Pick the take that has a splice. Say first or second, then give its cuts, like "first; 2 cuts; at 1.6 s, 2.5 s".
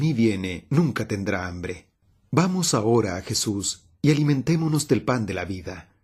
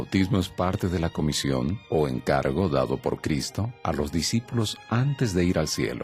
second; 1 cut; at 3.3 s